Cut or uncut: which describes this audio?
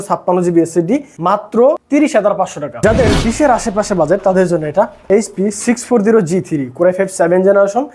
cut